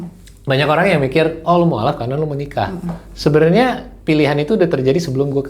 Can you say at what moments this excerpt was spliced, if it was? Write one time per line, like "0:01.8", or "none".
none